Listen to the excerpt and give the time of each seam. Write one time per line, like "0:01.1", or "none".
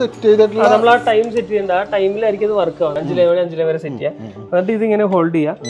0:03.0